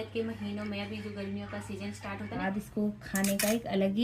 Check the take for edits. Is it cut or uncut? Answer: cut